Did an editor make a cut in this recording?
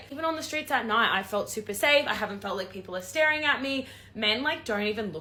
no; 0 cuts

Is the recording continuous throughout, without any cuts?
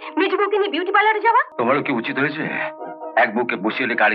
no; 1 cut; at 1.5 s

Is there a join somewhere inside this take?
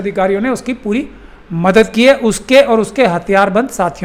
no; 0 cuts

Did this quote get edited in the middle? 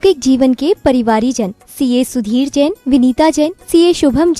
no; 0 cuts

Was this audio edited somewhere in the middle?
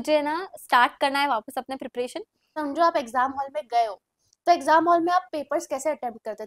yes; 1 cut; at 2.5 s

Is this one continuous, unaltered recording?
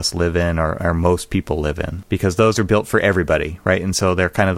no; 1 cut; at 1.9 s

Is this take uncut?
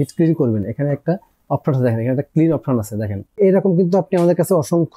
no; 1 cut; at 3.3 s

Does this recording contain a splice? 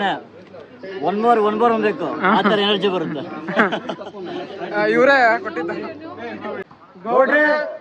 yes; 1 cut; at 6.7 s

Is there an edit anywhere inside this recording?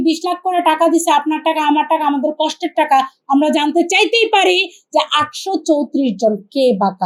no; 0 cuts

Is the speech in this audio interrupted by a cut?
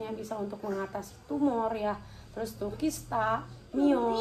no; 0 cuts

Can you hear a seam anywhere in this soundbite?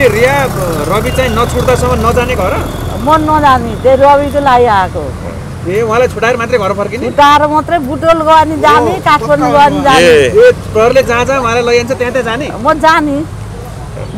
no; 0 cuts

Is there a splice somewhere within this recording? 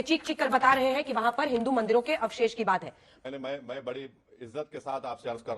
yes; 1 cut; at 3.1 s

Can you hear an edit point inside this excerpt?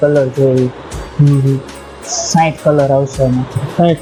no; 0 cuts

